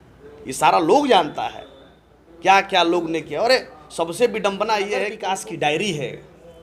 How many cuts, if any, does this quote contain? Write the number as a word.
one